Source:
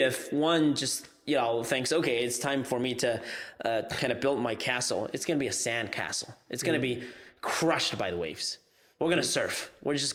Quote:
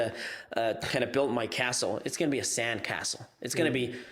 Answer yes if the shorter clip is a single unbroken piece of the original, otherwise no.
yes